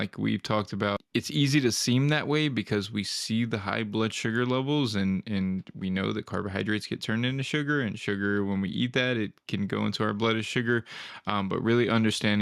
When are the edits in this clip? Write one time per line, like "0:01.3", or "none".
0:01.0